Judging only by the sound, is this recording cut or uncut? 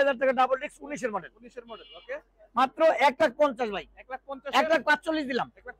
uncut